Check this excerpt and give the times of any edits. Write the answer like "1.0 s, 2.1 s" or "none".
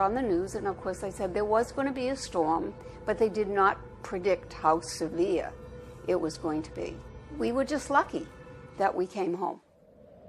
2.9 s